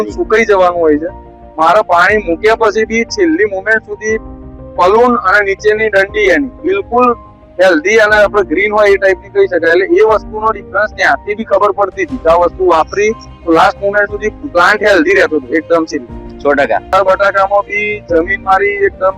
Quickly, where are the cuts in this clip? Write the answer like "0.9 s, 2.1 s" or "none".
16.9 s

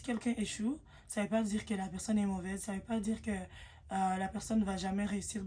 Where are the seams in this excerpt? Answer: none

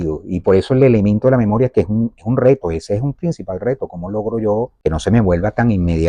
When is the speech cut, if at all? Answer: none

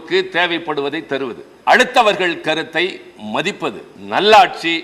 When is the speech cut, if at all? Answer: 1.5 s, 3.9 s

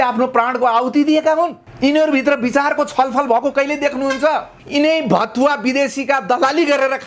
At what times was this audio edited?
1.6 s, 4.5 s

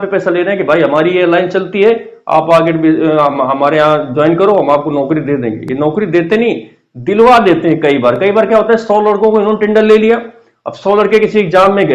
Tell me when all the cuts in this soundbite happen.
none

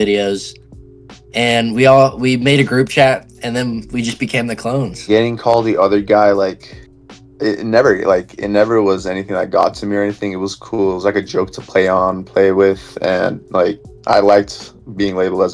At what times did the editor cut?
5.1 s

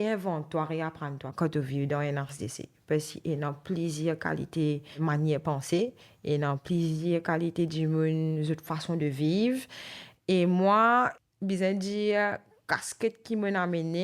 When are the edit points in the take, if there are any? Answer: 1.3 s, 4.9 s, 11.1 s

